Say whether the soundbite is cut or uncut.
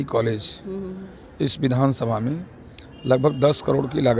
uncut